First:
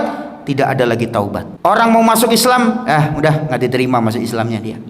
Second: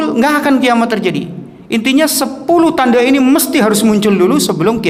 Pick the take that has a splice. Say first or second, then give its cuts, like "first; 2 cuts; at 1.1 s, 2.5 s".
first; 1 cut; at 1.5 s